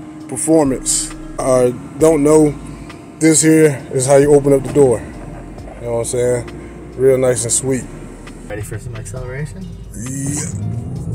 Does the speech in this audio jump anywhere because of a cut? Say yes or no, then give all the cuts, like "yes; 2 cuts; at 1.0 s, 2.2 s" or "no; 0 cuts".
yes; 2 cuts; at 1.4 s, 8.4 s